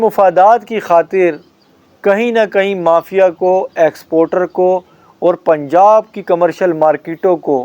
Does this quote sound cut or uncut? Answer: uncut